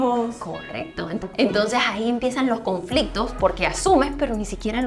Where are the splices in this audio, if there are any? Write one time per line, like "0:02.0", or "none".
0:01.2